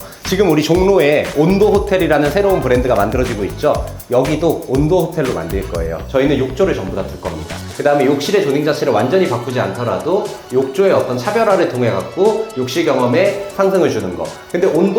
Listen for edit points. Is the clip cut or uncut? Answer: cut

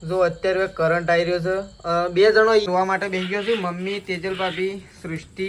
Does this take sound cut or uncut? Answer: cut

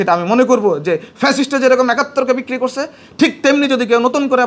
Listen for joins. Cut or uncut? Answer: uncut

